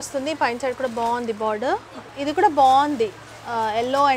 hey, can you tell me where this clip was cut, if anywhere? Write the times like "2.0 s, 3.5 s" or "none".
1.9 s